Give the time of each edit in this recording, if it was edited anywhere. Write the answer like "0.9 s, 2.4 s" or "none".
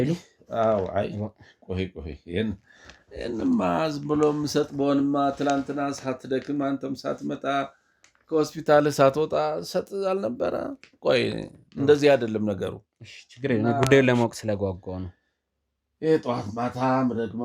none